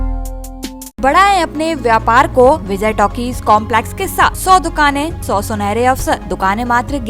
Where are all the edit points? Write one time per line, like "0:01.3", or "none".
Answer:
0:01.0
0:02.7
0:04.4
0:05.2
0:06.3